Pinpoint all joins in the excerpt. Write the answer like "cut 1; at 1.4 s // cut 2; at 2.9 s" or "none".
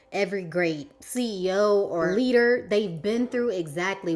cut 1; at 2.1 s